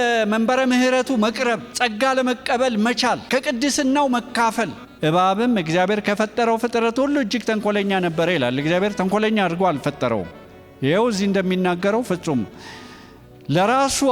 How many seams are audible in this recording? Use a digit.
1